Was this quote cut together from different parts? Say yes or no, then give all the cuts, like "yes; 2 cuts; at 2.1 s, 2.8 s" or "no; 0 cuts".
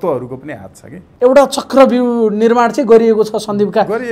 yes; 1 cut; at 1.0 s